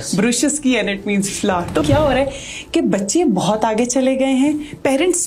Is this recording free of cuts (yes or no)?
no